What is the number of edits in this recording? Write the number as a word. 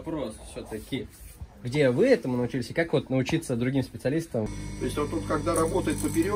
one